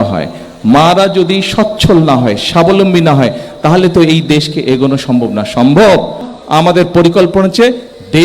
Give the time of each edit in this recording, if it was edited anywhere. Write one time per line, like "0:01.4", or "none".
0:06.4